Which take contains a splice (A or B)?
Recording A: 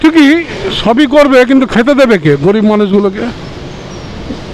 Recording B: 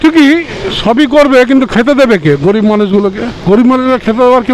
B